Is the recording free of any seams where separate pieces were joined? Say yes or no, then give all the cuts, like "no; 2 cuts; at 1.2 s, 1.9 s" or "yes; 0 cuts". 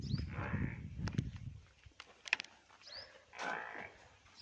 yes; 0 cuts